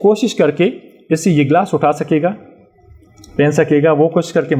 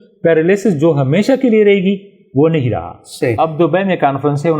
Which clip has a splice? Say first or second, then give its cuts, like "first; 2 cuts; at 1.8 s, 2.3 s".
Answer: second; 1 cut; at 3.3 s